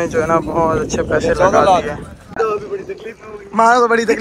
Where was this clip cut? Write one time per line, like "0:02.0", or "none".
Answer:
0:02.2

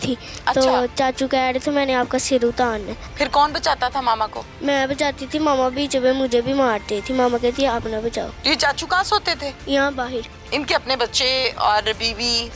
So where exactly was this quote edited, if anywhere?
none

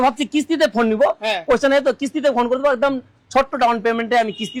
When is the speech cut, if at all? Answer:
none

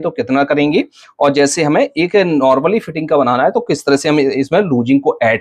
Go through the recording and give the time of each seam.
none

